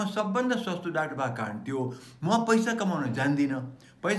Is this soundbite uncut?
yes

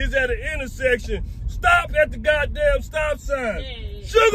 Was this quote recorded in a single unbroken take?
yes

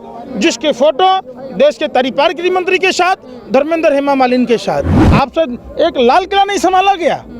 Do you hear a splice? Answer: yes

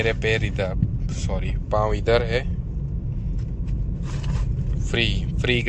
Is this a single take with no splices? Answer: yes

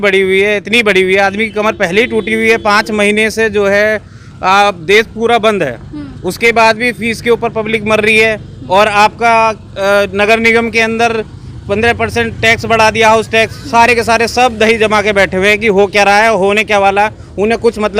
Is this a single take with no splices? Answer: yes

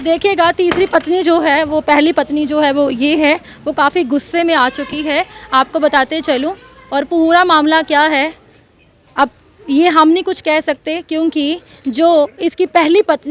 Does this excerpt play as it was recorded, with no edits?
yes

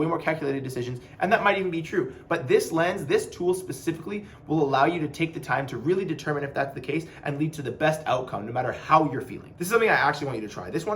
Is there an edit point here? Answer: yes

